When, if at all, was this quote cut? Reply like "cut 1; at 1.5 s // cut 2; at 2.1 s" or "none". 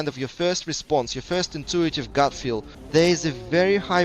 cut 1; at 2.7 s

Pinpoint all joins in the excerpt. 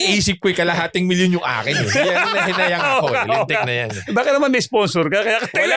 none

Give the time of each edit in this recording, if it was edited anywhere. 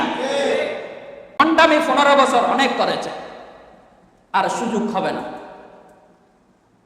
cut 1; at 1.4 s

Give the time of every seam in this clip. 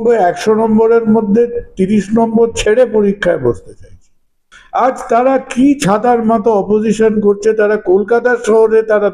cut 1; at 4.6 s

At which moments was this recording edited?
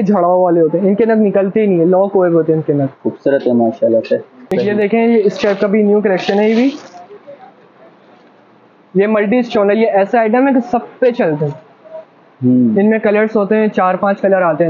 cut 1; at 4.4 s

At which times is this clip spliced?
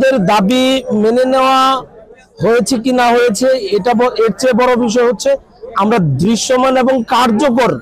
none

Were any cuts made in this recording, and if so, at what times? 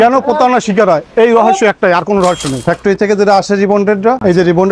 cut 1; at 2.6 s

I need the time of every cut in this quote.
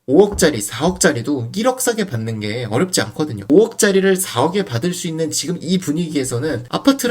cut 1; at 3.5 s

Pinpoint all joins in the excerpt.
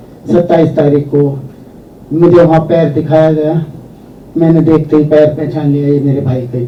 none

